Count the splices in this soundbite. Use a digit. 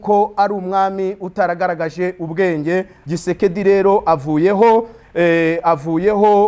1